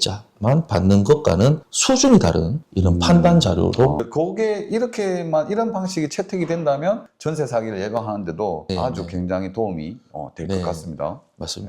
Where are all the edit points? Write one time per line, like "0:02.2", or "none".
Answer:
0:04.0